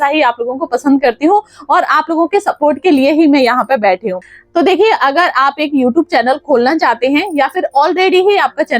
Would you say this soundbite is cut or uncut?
cut